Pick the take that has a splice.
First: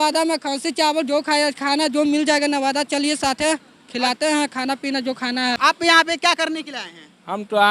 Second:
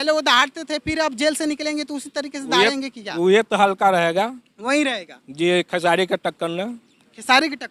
first; 1 cut; at 5.6 s

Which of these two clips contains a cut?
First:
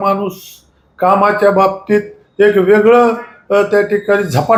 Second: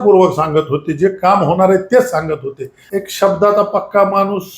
second; 1 cut; at 2.8 s

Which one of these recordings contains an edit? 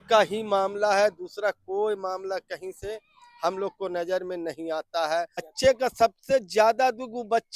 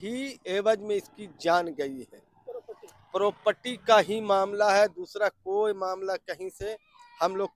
first; 1 cut; at 5.5 s

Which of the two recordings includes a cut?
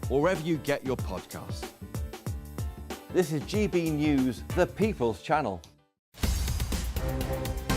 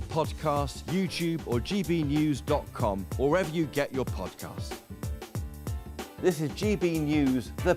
first; 1 cut; at 6.1 s

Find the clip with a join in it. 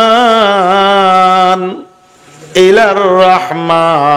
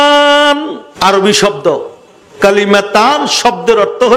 second; 2 cuts; at 0.9 s, 2.3 s

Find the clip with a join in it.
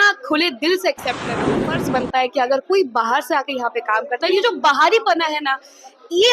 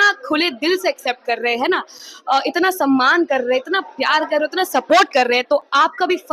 first; 1 cut; at 1.6 s

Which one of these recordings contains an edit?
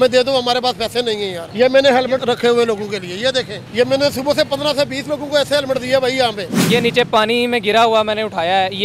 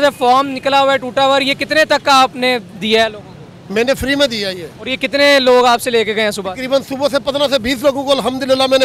first; 4 cuts; at 1.4 s, 2.2 s, 3.6 s, 6.5 s

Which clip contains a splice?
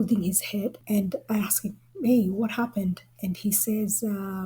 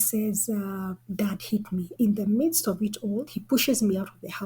second; 2 cuts; at 1.9 s, 3.4 s

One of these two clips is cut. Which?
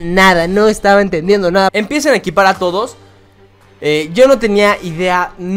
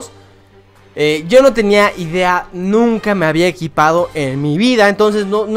first; 1 cut; at 1.7 s

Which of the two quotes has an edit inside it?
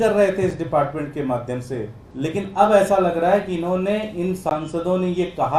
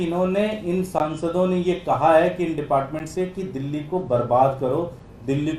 first; 1 cut; at 2.0 s

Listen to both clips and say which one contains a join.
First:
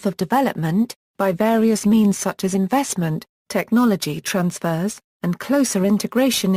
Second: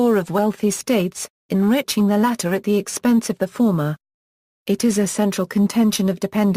first; 1 cut; at 2.5 s

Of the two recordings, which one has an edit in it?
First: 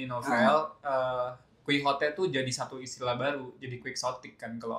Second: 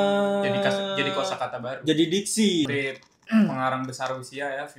second; 1 cut; at 2.7 s

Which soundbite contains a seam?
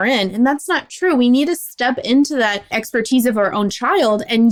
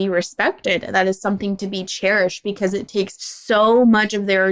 second; 1 cut; at 3.3 s

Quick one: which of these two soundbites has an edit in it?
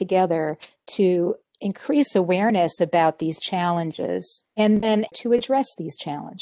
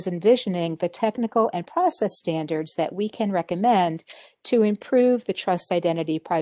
first; 2 cuts; at 4.4 s, 5.1 s

